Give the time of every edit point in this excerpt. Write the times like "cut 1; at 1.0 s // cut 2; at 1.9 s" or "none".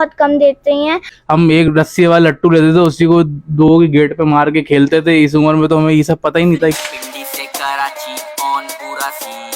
cut 1; at 1.0 s // cut 2; at 6.8 s